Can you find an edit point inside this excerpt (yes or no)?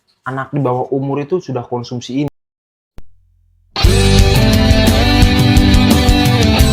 yes